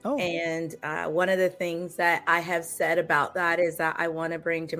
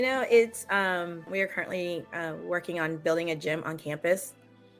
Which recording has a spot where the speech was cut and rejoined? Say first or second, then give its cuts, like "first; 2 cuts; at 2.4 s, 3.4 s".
second; 1 cut; at 1.3 s